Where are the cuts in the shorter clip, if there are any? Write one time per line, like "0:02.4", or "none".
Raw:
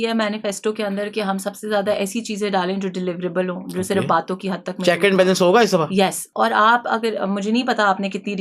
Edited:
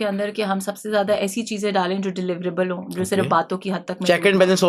none